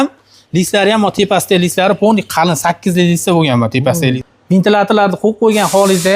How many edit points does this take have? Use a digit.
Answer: 1